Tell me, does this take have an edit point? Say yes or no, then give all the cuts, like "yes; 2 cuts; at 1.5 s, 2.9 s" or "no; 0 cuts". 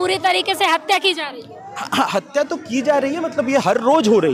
no; 0 cuts